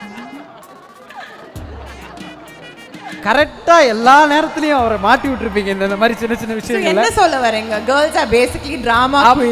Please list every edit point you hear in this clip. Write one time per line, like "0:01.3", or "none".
0:03.2